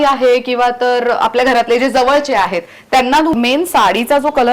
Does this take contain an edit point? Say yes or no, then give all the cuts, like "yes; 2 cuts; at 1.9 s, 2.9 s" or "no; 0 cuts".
yes; 1 cut; at 3.3 s